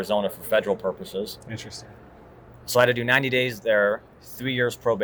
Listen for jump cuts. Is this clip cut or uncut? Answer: uncut